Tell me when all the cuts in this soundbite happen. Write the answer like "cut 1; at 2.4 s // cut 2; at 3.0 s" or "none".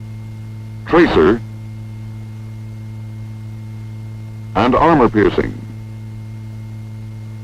cut 1; at 3.4 s